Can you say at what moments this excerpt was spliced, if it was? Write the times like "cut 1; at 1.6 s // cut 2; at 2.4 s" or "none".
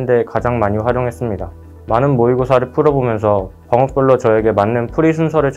none